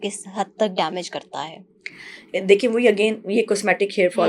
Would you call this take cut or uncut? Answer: uncut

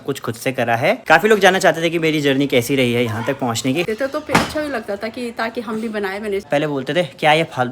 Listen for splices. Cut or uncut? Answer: cut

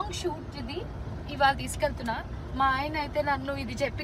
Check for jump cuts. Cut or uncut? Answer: uncut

